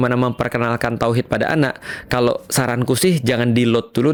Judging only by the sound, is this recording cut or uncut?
uncut